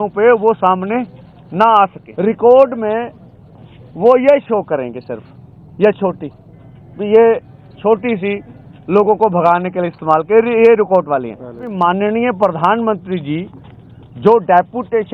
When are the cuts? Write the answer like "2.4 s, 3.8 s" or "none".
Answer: 2.0 s, 11.7 s